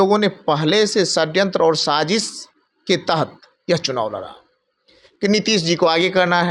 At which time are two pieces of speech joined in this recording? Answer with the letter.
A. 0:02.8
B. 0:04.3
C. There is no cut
C